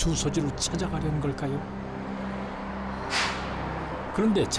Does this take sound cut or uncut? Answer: uncut